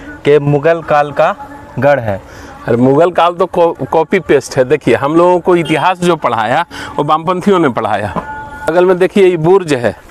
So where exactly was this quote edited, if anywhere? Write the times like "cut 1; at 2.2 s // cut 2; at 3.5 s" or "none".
cut 1; at 8.7 s